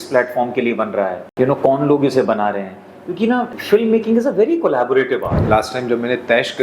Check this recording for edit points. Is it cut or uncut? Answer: cut